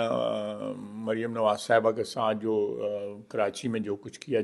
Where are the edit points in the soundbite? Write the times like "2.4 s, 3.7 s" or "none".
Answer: none